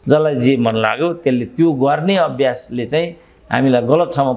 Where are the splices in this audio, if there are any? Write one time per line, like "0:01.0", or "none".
none

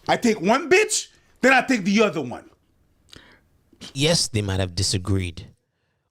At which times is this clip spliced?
0:03.9

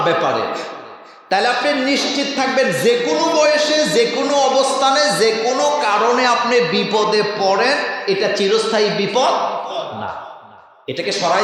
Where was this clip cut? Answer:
none

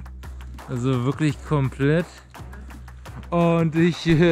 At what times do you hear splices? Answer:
none

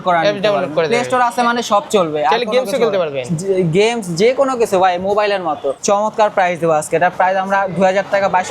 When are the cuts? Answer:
0:05.8

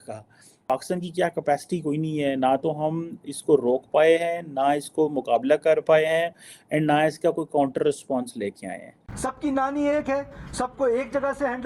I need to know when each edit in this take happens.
0:00.7
0:09.3

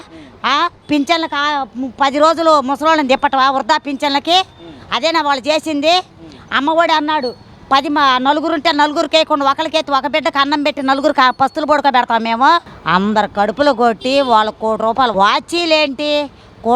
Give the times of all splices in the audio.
0:12.7
0:15.1

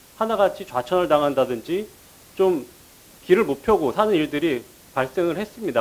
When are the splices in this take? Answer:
none

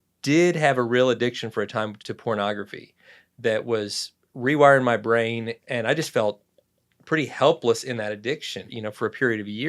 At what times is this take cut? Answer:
0:02.0
0:05.6
0:08.8

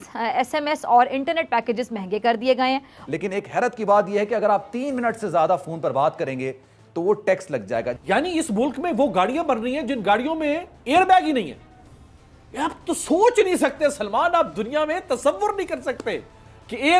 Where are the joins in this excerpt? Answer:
0:03.0
0:07.9

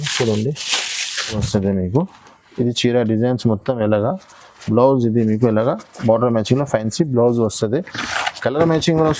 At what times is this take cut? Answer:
0:01.4

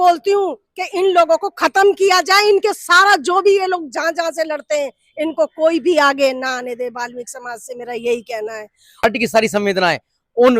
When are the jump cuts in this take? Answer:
0:09.0

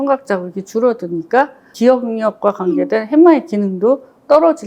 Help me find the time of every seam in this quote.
0:01.7

